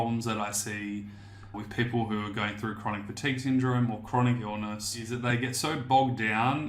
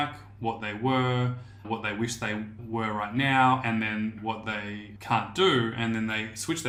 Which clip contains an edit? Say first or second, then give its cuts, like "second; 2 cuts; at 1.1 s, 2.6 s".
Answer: first; 1 cut; at 5.1 s